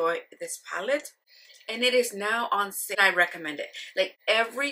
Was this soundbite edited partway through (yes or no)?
yes